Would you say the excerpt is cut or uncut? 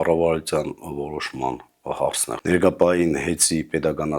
cut